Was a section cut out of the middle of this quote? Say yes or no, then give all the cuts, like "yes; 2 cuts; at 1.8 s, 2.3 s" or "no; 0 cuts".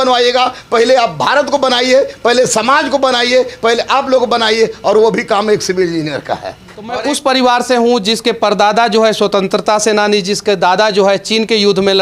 yes; 1 cut; at 6.9 s